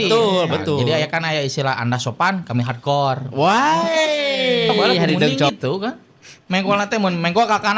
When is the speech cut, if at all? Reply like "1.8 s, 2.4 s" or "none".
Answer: 5.5 s